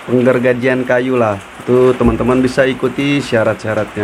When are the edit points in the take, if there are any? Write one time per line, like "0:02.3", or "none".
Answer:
0:01.5